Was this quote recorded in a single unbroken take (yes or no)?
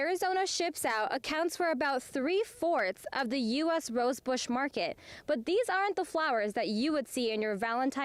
yes